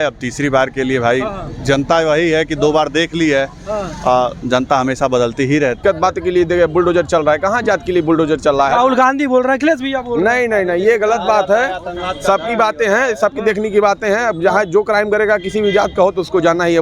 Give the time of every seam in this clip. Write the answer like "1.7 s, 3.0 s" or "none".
5.8 s